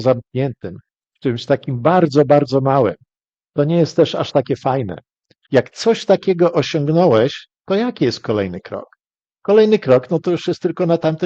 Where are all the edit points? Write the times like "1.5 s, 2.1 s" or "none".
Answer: 5.3 s